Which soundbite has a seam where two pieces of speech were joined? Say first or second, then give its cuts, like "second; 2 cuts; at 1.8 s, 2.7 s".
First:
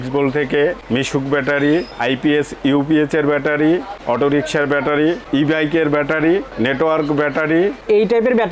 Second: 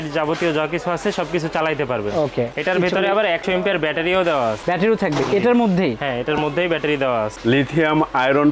second; 2 cuts; at 2.6 s, 7.4 s